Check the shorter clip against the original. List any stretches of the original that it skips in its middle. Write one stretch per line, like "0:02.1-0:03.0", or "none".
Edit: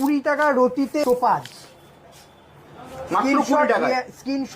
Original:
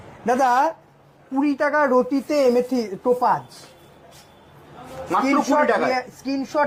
0:02.2-0:02.9